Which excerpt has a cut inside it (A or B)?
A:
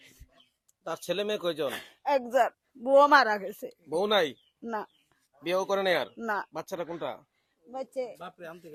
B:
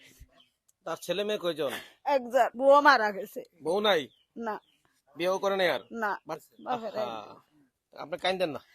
B